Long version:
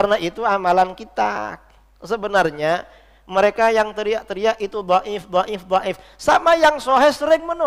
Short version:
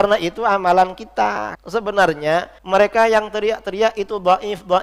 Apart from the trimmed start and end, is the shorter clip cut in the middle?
yes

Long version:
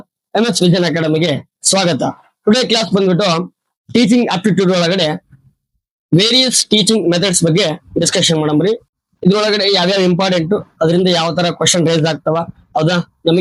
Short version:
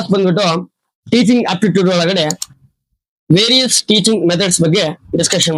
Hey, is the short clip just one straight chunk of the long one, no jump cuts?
yes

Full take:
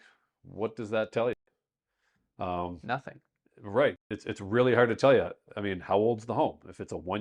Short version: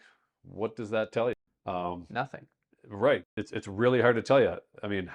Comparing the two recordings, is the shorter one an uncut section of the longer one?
no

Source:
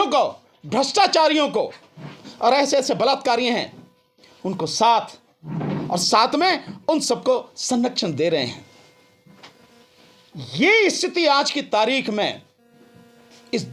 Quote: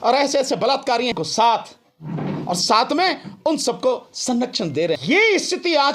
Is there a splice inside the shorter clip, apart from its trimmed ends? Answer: yes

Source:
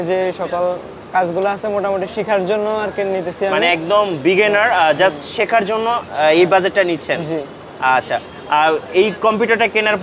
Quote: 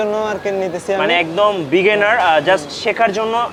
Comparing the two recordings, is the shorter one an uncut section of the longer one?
yes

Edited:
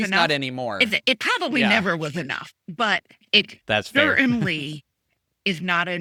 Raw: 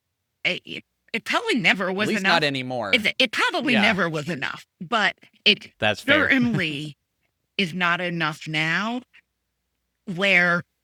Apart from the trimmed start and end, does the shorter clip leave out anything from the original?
no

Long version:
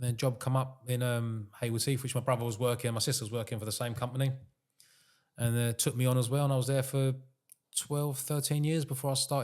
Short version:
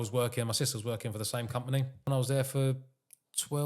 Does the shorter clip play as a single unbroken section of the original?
no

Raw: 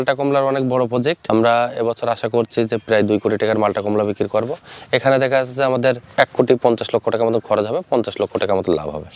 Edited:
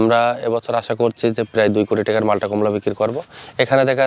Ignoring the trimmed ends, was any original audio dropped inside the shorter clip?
no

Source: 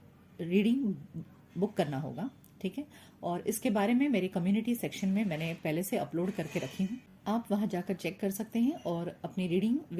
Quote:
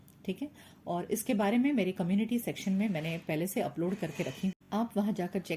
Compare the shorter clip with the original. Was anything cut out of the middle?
yes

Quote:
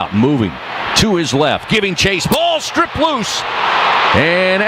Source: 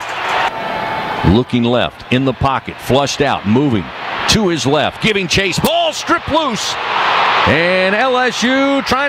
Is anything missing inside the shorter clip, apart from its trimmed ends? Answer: no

